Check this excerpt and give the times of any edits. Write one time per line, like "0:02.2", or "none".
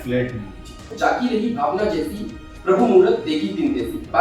0:00.9